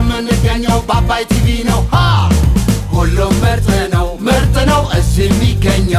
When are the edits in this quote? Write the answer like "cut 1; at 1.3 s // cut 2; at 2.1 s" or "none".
none